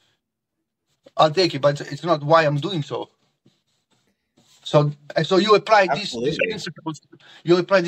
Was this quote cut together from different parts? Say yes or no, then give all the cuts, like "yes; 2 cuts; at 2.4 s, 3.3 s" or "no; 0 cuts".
yes; 2 cuts; at 1.8 s, 5.0 s